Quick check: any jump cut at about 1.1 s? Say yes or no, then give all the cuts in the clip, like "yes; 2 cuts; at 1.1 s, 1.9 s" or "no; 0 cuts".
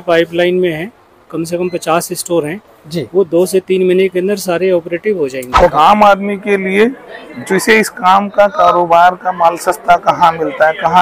no; 1 cut; at 5.7 s